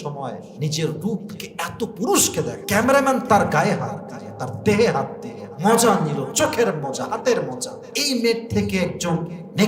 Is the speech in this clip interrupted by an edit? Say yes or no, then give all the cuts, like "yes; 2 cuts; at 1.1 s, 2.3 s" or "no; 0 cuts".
yes; 1 cut; at 2.6 s